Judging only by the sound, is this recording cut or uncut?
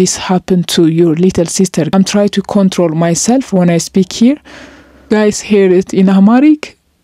cut